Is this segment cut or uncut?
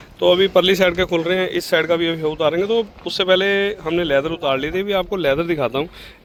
uncut